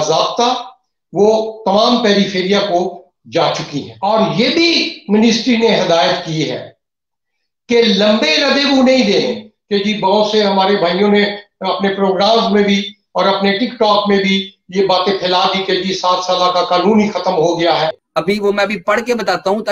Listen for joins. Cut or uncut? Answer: cut